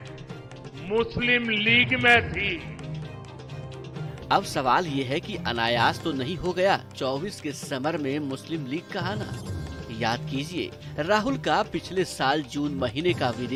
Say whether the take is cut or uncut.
uncut